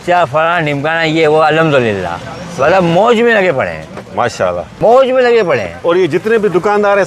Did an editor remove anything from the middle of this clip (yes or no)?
no